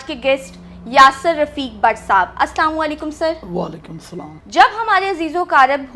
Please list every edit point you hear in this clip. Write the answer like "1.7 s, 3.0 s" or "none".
none